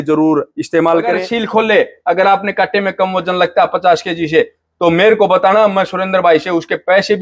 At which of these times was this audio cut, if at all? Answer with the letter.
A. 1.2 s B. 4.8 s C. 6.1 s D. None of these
A